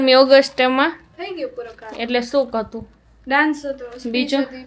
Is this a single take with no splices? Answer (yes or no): yes